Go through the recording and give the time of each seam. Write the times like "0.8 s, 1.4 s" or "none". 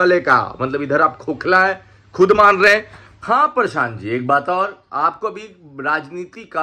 3.0 s